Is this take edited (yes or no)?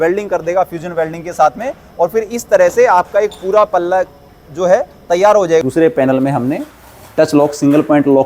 yes